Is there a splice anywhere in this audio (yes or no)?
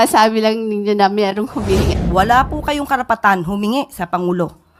yes